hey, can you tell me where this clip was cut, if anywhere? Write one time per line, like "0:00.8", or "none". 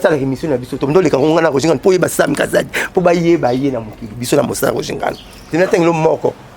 0:05.5